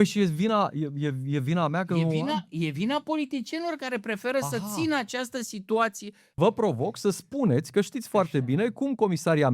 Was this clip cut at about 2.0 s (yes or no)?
no